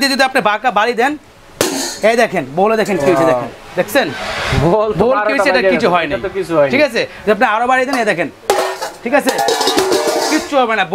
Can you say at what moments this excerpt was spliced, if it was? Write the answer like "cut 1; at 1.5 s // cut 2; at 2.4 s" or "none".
none